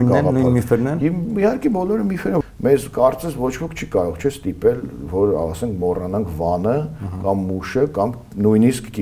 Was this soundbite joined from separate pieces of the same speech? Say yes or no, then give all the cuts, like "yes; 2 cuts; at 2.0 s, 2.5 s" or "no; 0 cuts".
yes; 1 cut; at 2.4 s